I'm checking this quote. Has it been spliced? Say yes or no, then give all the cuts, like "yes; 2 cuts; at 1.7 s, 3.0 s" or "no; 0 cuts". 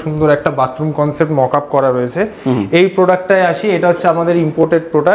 no; 0 cuts